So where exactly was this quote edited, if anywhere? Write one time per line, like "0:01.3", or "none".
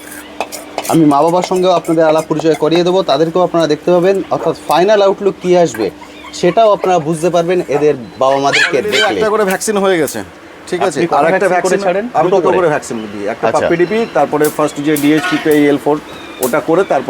0:09.1